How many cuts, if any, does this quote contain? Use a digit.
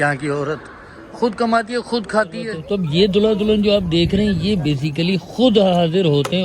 1